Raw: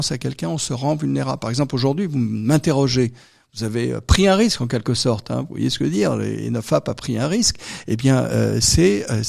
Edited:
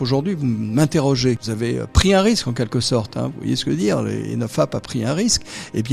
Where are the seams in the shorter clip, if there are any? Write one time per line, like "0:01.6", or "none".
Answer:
0:01.5